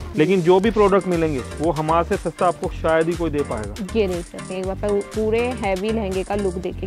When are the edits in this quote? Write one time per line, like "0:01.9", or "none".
none